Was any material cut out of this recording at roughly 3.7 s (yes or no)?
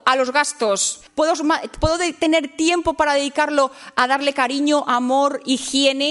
no